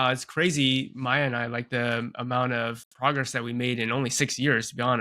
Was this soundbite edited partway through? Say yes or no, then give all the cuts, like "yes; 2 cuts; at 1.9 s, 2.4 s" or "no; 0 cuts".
no; 0 cuts